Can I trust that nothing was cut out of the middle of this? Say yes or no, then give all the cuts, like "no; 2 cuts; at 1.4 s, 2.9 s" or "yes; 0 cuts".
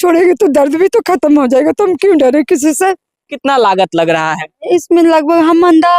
no; 1 cut; at 3.3 s